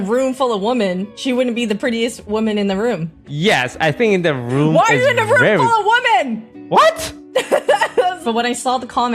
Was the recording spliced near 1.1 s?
yes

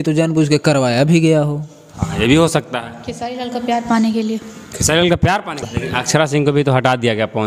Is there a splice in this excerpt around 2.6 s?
no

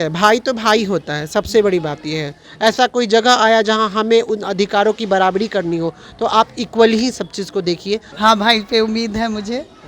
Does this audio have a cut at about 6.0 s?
no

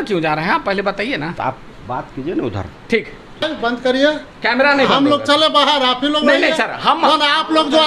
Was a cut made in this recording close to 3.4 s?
yes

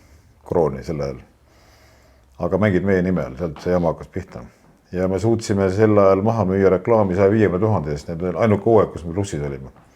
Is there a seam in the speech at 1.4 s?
no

